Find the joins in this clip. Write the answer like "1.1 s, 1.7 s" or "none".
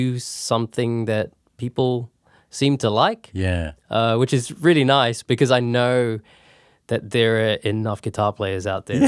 none